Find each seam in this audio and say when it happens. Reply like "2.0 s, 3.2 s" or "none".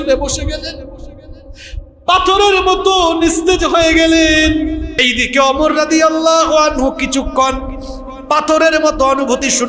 5.0 s